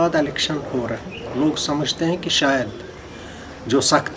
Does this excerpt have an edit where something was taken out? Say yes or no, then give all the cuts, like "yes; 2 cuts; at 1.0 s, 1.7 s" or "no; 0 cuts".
no; 0 cuts